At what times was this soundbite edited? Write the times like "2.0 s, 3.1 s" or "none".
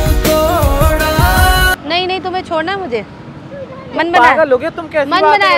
1.8 s

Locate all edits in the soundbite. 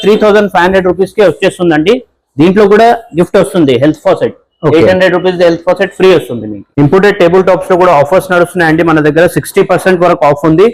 none

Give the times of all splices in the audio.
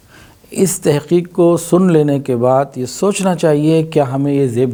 none

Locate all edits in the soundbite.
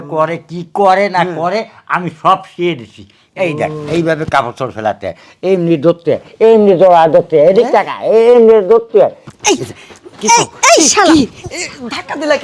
9.2 s

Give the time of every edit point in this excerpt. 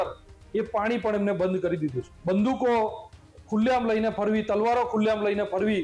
2.1 s

